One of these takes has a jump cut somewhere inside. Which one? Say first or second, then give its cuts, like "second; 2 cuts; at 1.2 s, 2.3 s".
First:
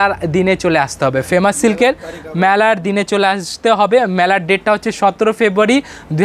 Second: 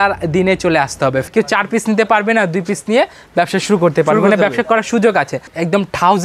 second; 2 cuts; at 1.3 s, 5.5 s